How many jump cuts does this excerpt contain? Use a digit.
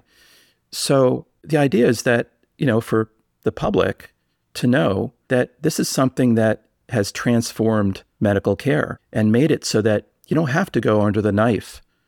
4